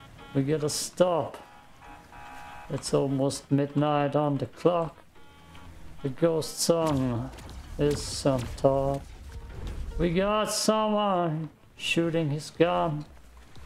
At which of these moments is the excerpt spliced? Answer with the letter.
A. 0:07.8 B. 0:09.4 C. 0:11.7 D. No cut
D